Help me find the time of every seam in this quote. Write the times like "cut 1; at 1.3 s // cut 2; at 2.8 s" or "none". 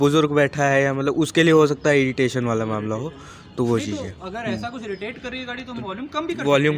none